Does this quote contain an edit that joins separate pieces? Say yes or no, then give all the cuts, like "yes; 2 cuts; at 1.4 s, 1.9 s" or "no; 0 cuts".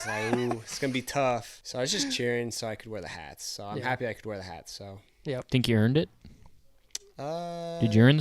yes; 1 cut; at 1.6 s